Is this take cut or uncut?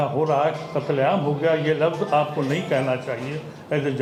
uncut